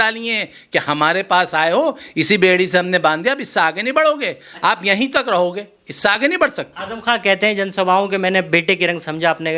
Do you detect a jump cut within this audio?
no; 0 cuts

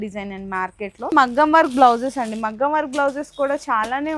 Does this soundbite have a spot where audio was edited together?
yes; 1 cut; at 1.1 s

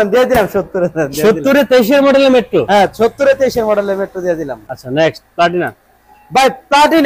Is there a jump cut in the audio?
no; 0 cuts

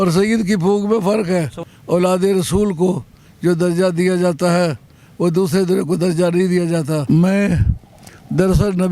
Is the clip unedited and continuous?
no; 2 cuts; at 1.6 s, 7.0 s

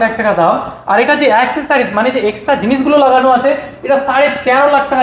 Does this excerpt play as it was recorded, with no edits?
yes; 0 cuts

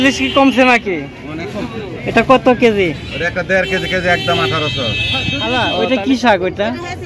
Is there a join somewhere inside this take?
yes; 1 cut; at 5.9 s

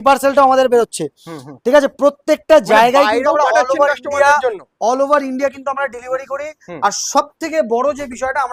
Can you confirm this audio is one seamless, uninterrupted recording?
yes; 0 cuts

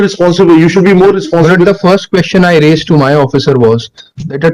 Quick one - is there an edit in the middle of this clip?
no; 0 cuts

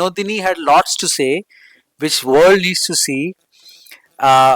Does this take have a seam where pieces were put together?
no; 0 cuts

